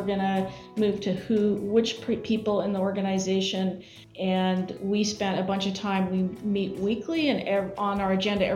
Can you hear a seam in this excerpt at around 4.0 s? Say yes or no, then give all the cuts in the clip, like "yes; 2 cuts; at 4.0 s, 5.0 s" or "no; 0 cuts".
yes; 1 cut; at 4.0 s